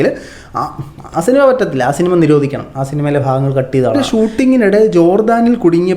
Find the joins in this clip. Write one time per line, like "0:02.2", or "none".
0:04.0